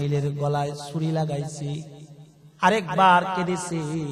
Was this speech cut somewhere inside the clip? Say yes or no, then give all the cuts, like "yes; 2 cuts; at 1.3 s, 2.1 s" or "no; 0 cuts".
no; 0 cuts